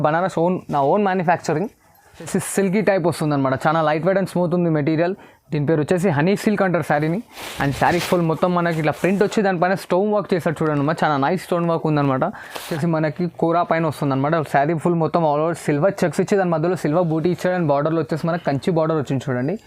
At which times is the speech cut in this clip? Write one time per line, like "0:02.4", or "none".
0:02.3
0:12.7